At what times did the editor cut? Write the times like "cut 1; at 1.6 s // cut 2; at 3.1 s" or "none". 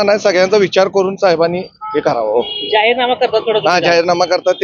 none